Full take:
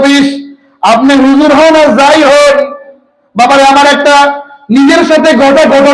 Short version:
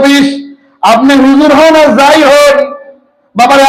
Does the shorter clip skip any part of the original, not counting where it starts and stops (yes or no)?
no